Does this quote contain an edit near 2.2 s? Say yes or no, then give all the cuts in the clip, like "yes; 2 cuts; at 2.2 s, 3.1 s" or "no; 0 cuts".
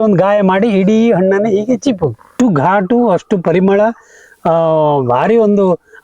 yes; 1 cut; at 2.2 s